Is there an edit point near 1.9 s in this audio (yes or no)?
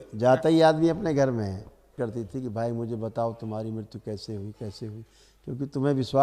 yes